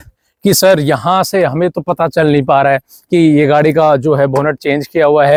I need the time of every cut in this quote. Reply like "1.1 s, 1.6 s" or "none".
none

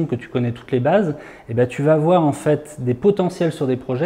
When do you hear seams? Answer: none

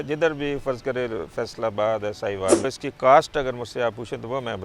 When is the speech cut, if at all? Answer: 2.6 s

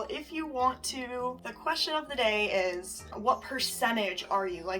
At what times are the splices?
1.5 s, 3.1 s

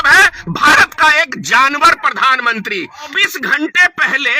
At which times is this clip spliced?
3.1 s

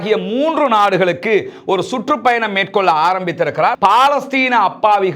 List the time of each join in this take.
3.8 s

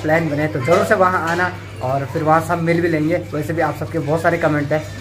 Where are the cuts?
none

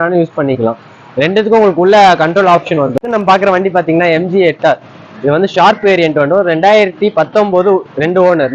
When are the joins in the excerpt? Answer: 3.0 s

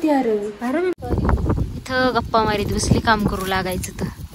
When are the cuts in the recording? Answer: 0.9 s

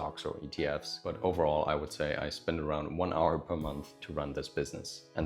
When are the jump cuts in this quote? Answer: 0.9 s, 3.9 s

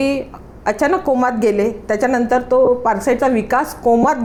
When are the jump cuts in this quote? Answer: none

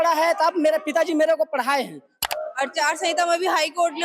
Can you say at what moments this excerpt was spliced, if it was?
2.2 s

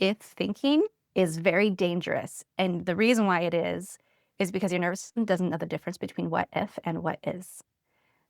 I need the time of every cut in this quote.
1.0 s

